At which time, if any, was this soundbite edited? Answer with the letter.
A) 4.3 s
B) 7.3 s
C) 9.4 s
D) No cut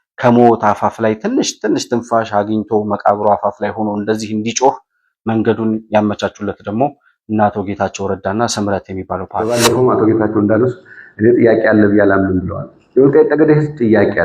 C